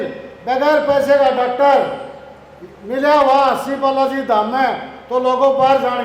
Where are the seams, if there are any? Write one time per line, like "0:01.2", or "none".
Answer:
none